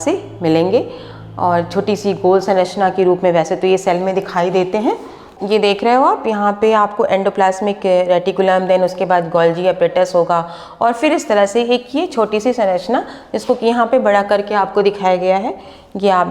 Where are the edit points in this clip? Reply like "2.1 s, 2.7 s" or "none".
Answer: 5.3 s